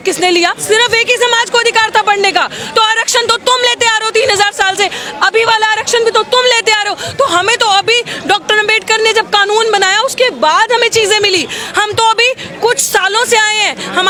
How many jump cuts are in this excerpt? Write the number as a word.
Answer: zero